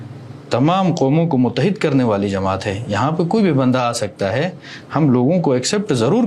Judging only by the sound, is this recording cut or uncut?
uncut